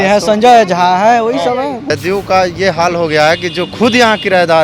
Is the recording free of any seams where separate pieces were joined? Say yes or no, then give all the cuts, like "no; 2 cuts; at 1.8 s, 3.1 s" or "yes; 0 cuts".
no; 1 cut; at 1.8 s